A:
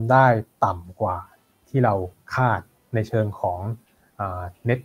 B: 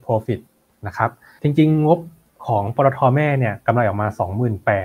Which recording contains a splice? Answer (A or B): B